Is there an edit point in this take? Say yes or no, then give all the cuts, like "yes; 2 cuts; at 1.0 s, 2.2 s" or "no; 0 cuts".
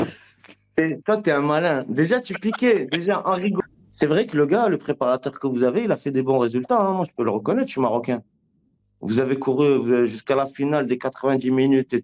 yes; 1 cut; at 3.6 s